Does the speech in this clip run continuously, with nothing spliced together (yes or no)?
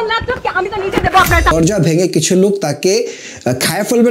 no